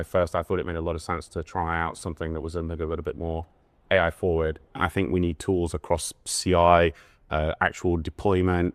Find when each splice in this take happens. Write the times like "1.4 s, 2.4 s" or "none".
4.8 s